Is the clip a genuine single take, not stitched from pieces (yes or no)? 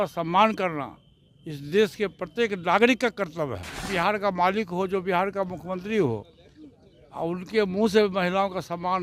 no